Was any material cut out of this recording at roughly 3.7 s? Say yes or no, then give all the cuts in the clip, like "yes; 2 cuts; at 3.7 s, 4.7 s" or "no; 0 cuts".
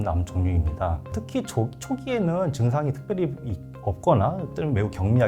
no; 1 cut; at 1.2 s